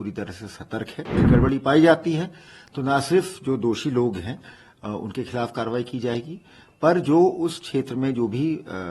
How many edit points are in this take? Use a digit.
1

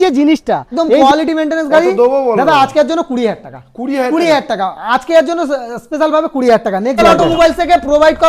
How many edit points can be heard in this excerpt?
2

